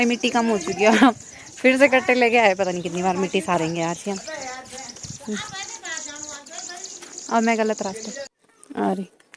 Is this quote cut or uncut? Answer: uncut